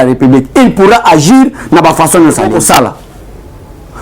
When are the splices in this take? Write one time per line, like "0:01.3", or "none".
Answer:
0:02.5